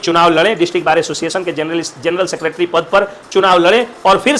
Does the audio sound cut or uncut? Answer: uncut